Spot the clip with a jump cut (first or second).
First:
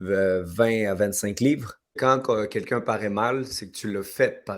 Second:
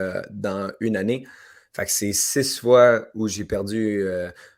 first